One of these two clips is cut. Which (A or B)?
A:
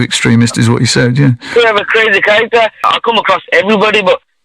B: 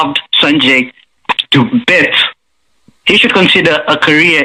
A